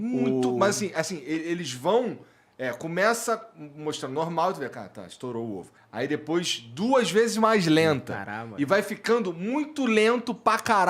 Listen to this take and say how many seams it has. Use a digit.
1